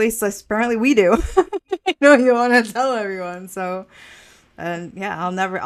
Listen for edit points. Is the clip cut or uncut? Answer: uncut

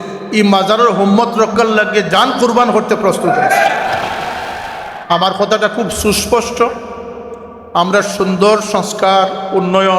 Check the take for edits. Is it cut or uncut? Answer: cut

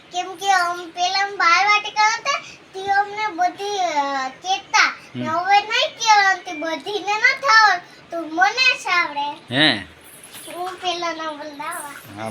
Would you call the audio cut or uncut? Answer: uncut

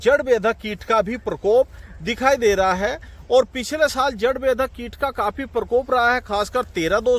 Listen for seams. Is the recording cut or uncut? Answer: uncut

